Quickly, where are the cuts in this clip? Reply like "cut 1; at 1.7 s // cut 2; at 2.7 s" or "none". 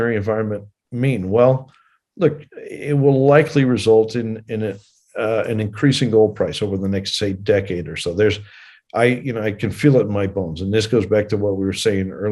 none